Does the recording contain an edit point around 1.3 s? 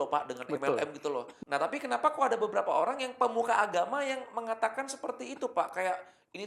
yes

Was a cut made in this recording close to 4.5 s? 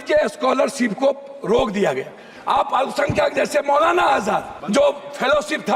yes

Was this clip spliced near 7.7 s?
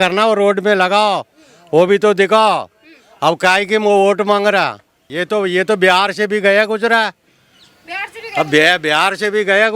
no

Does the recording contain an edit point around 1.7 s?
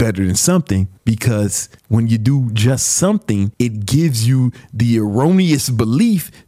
yes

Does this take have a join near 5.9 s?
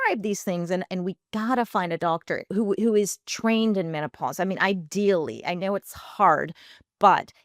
no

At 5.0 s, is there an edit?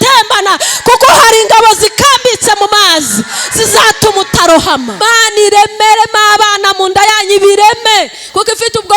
yes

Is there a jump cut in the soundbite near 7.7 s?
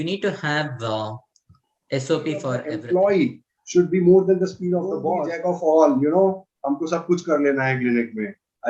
no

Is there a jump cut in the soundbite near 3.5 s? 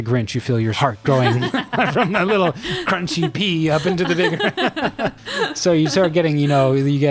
no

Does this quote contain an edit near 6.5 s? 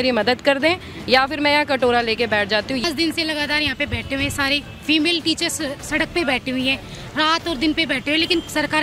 no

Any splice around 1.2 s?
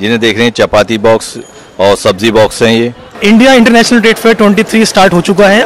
no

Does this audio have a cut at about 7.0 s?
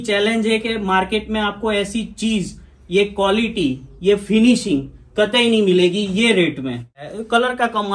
yes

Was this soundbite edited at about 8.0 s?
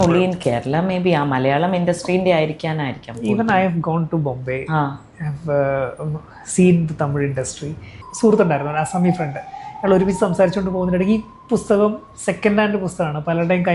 yes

